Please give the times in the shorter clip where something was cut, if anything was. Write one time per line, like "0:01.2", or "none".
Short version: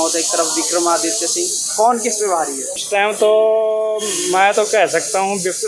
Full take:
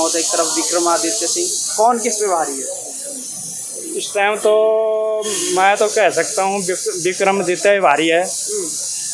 0:02.8